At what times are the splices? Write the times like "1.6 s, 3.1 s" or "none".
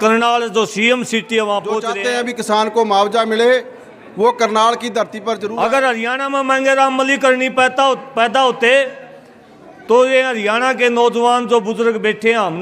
1.9 s, 5.4 s